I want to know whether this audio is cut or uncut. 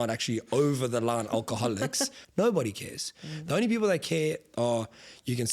cut